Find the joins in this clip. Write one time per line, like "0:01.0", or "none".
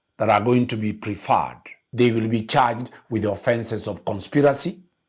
0:01.8

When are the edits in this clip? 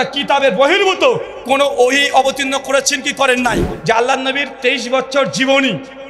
0:03.7

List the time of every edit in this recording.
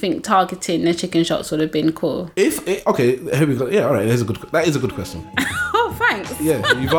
none

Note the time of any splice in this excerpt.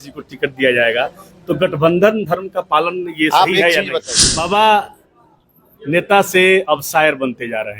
0:04.0

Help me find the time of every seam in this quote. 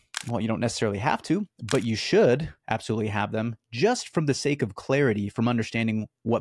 none

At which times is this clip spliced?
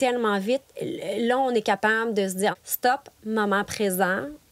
0:02.6

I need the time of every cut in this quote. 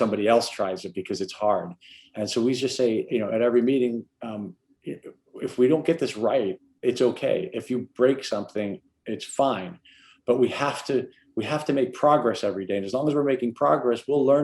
none

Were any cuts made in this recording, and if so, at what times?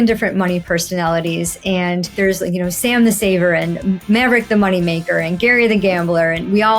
0:02.2

